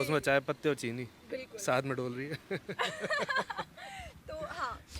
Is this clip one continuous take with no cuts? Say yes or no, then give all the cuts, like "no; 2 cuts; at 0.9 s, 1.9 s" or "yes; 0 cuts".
yes; 0 cuts